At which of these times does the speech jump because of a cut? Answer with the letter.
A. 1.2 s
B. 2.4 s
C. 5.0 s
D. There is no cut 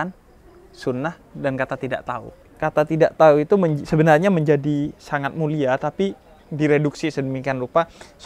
B